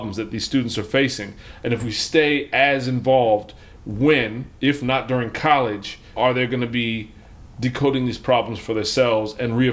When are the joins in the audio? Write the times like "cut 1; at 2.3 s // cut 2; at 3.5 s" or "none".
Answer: cut 1; at 6.1 s